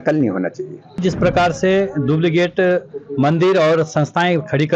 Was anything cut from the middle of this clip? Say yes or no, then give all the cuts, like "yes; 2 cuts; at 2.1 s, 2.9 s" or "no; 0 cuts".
yes; 1 cut; at 1.0 s